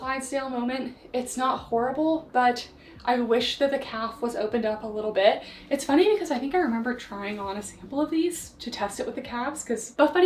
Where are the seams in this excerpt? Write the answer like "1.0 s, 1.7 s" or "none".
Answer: none